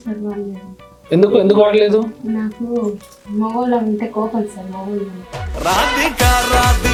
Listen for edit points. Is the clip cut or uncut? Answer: uncut